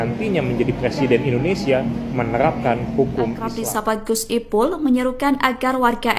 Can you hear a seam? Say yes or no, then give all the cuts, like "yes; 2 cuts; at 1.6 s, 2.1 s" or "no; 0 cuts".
yes; 1 cut; at 3.6 s